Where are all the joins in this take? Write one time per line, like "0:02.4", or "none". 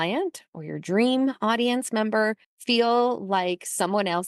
0:02.5